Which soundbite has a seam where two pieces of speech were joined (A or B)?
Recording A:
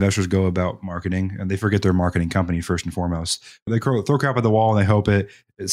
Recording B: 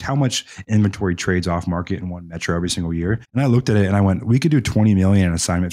B